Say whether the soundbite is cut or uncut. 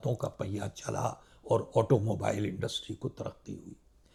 uncut